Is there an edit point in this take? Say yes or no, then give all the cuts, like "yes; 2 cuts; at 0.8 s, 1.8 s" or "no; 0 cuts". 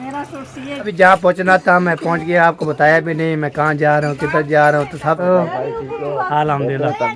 yes; 2 cuts; at 0.9 s, 5.2 s